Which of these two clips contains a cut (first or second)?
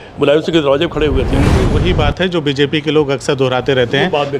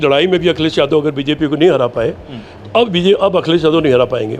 first